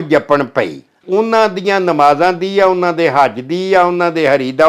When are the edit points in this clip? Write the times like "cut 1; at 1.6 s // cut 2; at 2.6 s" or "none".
cut 1; at 1.0 s